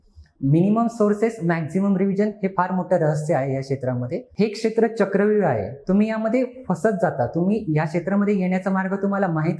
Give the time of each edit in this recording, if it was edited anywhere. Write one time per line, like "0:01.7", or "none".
0:04.2